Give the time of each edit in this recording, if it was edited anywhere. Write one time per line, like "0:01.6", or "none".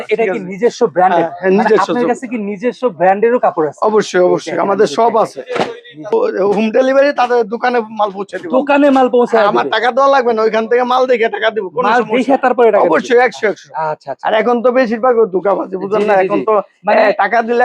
0:06.1